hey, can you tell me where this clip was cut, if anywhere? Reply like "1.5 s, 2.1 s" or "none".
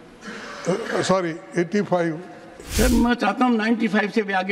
2.6 s